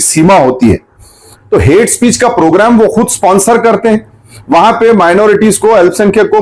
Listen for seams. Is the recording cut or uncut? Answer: cut